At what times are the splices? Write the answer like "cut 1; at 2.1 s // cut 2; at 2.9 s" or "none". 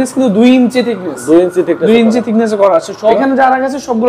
cut 1; at 3.2 s